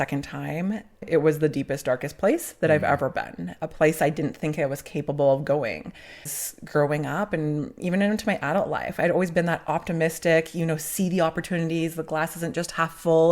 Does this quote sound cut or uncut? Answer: cut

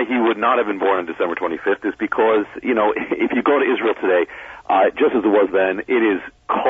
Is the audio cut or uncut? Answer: uncut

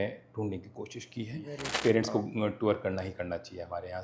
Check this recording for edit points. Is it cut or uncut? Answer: cut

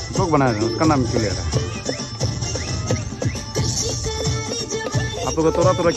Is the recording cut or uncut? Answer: uncut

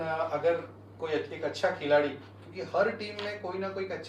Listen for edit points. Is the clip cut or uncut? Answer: uncut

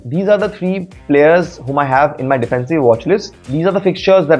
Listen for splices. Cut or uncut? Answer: cut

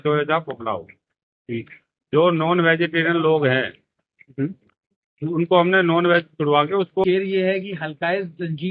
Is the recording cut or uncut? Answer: cut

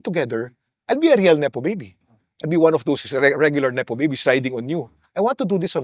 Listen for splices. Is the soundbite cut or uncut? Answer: uncut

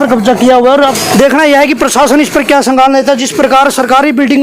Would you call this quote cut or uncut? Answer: cut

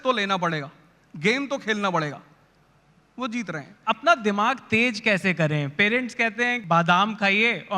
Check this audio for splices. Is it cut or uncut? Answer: cut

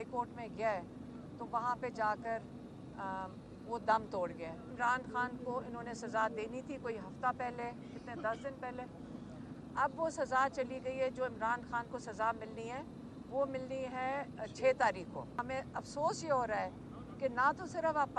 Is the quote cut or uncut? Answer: cut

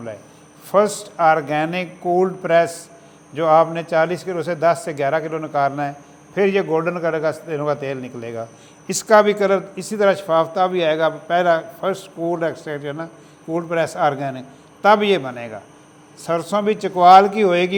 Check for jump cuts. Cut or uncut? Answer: uncut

